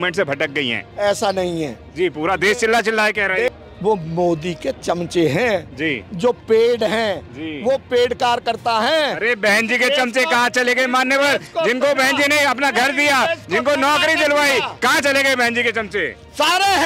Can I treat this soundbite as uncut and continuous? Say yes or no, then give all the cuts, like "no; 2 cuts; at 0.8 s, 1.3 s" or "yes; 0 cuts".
no; 1 cut; at 3.5 s